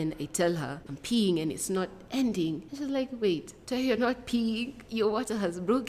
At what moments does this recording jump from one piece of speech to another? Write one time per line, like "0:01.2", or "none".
0:00.9
0:02.7
0:03.5
0:04.8